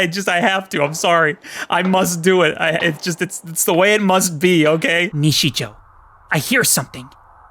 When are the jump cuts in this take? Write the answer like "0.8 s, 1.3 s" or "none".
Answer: 5.1 s